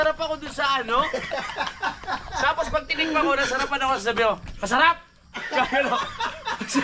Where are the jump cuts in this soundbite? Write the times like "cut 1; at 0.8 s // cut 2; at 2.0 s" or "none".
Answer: none

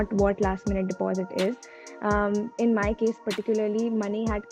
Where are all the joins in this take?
none

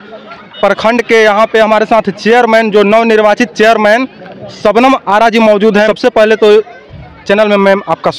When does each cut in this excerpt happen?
cut 1; at 5.9 s

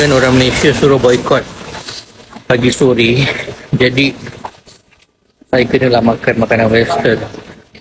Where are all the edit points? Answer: none

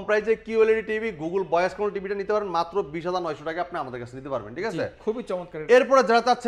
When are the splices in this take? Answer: none

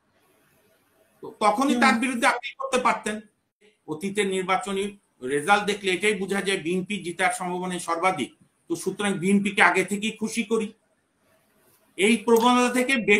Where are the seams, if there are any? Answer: cut 1; at 3.6 s

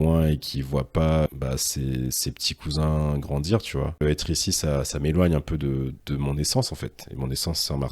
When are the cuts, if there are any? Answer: cut 1; at 1.3 s // cut 2; at 4.0 s

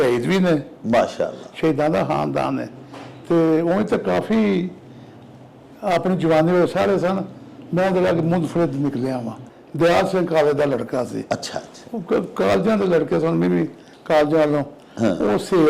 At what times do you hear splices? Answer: cut 1; at 9.4 s

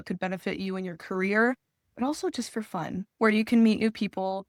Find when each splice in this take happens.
none

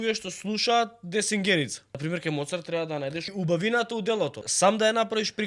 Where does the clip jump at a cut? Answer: cut 1; at 1.9 s // cut 2; at 3.3 s // cut 3; at 4.5 s

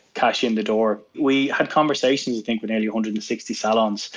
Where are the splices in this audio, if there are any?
cut 1; at 1.2 s

